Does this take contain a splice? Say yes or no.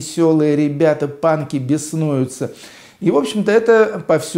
no